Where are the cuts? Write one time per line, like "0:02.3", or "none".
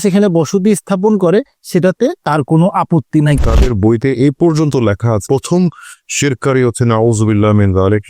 0:03.4